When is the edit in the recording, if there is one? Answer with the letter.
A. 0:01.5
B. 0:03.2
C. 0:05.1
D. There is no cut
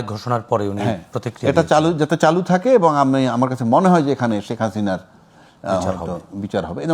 D